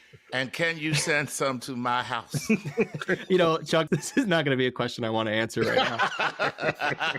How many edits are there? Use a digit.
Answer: 1